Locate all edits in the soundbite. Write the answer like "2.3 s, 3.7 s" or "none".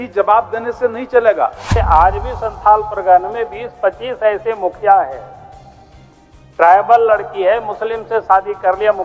1.7 s